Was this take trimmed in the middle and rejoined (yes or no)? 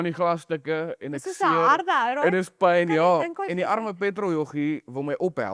no